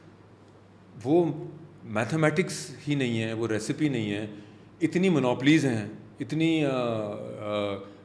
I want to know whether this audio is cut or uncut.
uncut